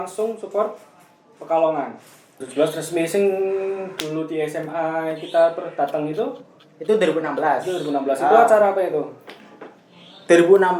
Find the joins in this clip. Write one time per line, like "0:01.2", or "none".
0:02.4

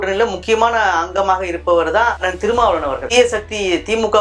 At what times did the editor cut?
0:03.0

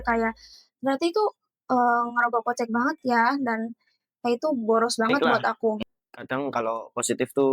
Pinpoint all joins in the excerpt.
0:05.8

